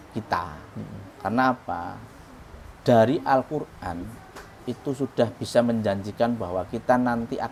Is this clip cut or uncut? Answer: uncut